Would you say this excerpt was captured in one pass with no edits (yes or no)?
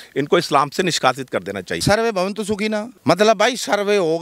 no